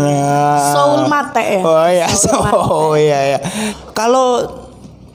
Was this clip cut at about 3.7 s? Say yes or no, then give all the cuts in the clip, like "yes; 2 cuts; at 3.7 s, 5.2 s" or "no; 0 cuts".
yes; 1 cut; at 3.7 s